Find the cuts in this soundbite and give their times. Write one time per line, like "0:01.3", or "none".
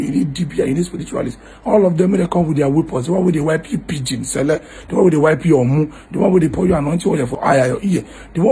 0:07.4

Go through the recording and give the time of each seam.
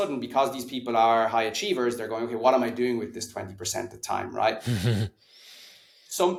none

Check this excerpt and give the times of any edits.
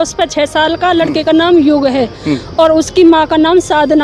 none

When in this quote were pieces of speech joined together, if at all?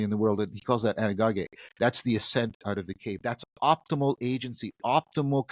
none

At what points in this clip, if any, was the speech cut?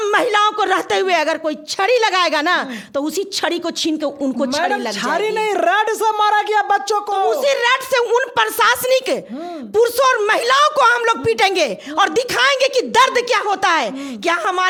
none

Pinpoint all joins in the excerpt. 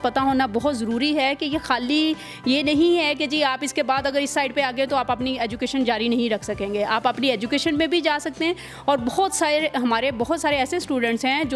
none

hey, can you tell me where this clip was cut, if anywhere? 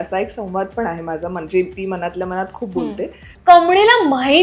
0:03.3

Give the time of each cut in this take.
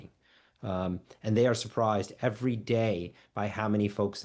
none

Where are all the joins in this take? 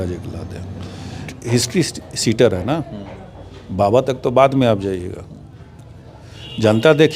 0:01.2

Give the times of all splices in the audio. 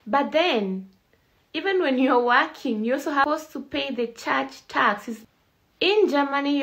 0:03.2
0:05.1

